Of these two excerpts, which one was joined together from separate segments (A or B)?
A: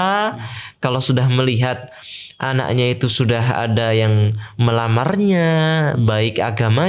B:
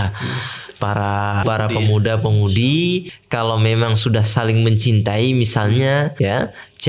B